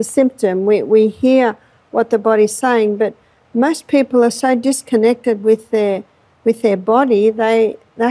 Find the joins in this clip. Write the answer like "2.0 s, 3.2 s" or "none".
none